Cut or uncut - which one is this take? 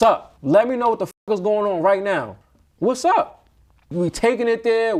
uncut